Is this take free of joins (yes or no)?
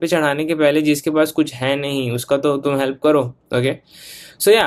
yes